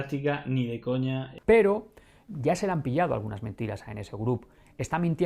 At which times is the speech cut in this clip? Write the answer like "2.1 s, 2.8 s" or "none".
1.3 s, 2.2 s